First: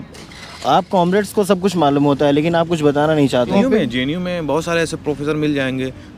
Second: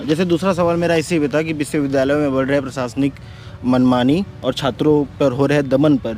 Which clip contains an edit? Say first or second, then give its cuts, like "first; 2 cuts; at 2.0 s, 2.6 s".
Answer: first; 1 cut; at 3.5 s